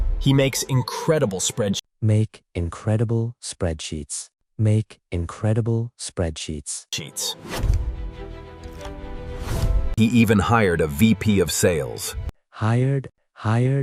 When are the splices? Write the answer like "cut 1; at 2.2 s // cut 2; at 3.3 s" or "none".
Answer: none